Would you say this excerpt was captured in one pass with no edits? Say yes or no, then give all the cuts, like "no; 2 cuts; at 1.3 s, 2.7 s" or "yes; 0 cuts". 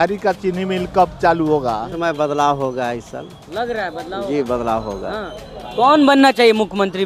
no; 1 cut; at 1.9 s